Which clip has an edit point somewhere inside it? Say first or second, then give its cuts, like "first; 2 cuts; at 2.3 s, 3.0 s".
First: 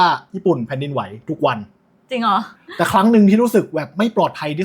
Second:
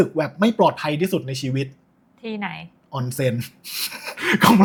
first; 1 cut; at 2.5 s